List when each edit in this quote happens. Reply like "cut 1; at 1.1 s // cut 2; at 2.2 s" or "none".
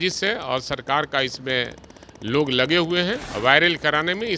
cut 1; at 3.3 s